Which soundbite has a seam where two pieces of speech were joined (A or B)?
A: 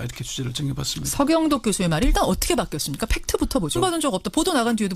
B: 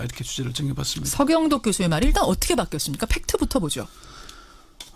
B